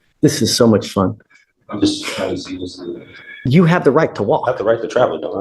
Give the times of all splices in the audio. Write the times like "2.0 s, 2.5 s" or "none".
3.3 s